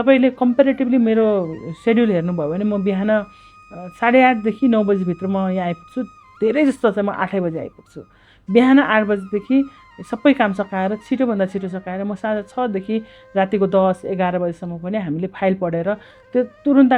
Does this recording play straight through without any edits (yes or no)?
yes